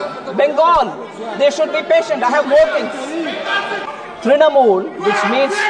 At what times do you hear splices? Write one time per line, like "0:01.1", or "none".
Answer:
0:04.3